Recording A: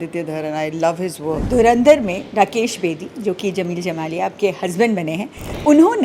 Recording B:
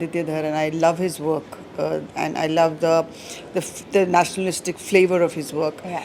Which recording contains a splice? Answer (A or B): A